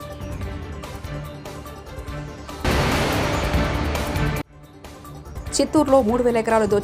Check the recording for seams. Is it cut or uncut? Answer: uncut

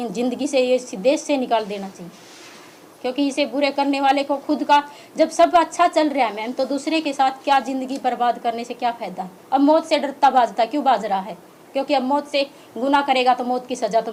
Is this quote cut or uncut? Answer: uncut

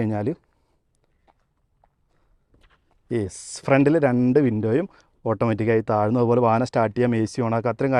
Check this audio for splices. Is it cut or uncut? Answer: uncut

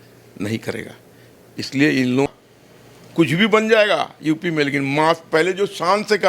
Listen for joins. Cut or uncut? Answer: cut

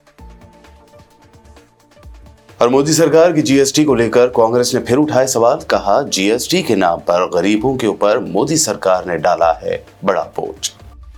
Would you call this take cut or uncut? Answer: uncut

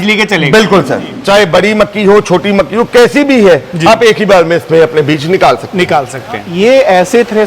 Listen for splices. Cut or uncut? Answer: cut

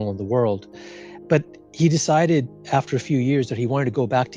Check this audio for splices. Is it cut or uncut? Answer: uncut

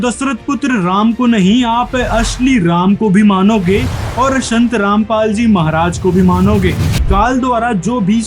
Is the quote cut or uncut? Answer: cut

